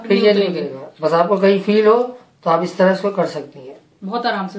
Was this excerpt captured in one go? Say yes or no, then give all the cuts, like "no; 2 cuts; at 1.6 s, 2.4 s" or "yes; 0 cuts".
yes; 0 cuts